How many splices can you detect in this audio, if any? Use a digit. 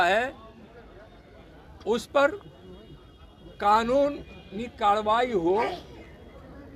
0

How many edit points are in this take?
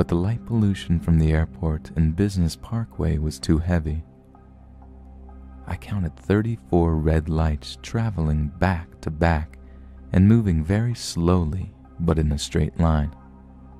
0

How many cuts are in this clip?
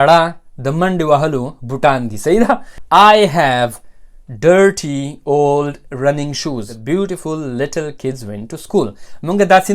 2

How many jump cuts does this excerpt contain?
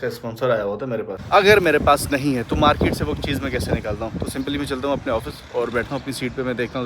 1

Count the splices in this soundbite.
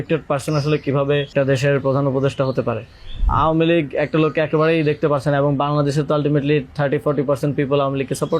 2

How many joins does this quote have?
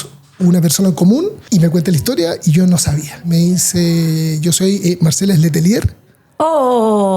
2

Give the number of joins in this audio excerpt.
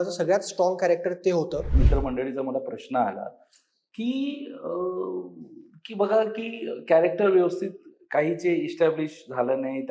1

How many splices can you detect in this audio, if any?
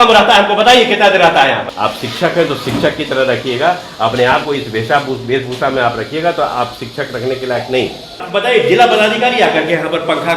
2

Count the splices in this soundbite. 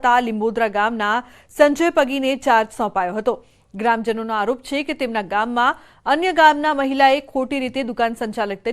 1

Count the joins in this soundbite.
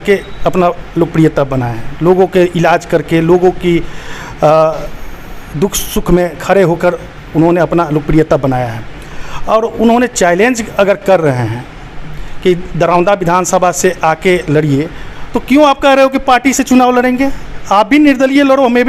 0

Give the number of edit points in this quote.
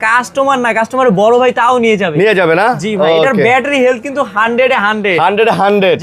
0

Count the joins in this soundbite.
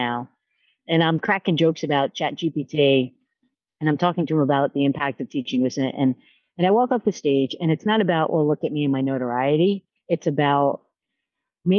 1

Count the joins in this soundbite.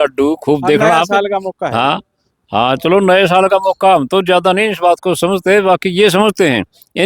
0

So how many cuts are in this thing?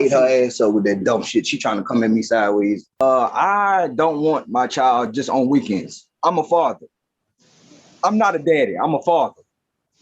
1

